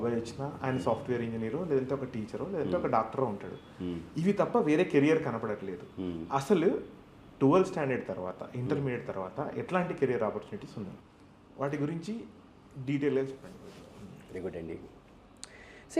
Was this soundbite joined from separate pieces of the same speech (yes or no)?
no